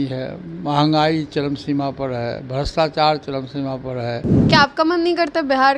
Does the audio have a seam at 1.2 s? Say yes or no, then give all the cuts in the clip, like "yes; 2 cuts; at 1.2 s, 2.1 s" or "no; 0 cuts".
no; 1 cut; at 4.3 s